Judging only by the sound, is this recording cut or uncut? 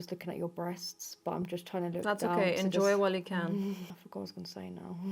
cut